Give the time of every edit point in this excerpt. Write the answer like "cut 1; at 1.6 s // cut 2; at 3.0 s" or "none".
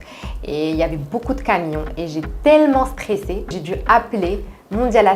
cut 1; at 3.6 s

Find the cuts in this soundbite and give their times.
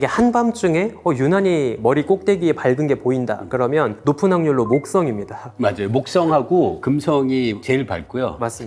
none

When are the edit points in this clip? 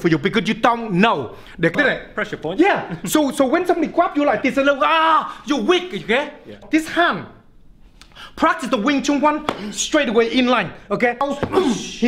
cut 1; at 1.7 s // cut 2; at 6.6 s // cut 3; at 11.2 s

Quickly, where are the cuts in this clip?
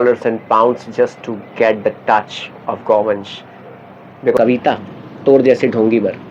cut 1; at 4.4 s

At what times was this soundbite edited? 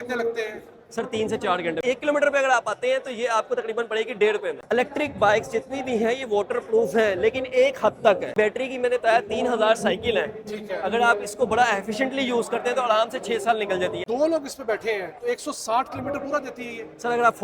cut 1; at 1.8 s // cut 2; at 4.6 s // cut 3; at 8.3 s // cut 4; at 14.0 s

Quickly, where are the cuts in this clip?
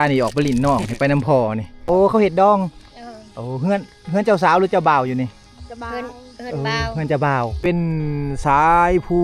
cut 1; at 1.7 s // cut 2; at 7.6 s

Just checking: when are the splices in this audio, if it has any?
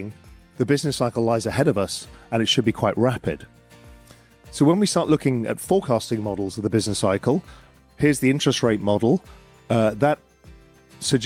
none

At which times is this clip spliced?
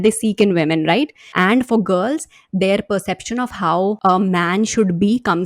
cut 1; at 1.2 s // cut 2; at 4.0 s

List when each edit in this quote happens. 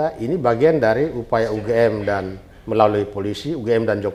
none

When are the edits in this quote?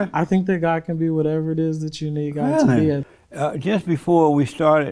cut 1; at 3.1 s

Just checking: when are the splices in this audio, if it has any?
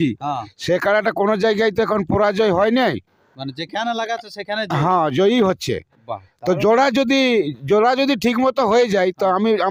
none

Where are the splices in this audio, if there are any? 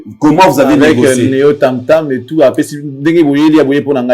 none

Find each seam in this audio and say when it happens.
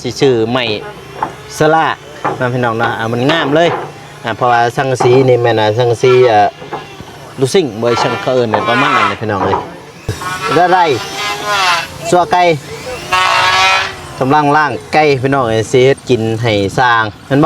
cut 1; at 10.3 s

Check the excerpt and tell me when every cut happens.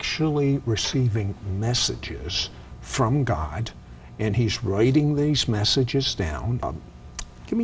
cut 1; at 6.6 s

